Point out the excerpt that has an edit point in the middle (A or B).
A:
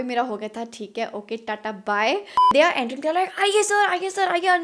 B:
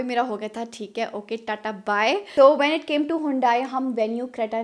A